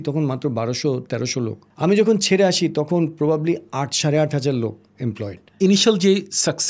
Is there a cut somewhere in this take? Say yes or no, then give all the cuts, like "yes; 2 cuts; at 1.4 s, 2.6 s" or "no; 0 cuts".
yes; 2 cuts; at 1.6 s, 5.6 s